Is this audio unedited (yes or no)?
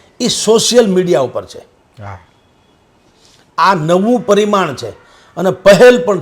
yes